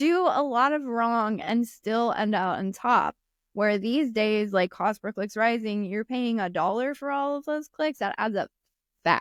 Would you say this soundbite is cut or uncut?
uncut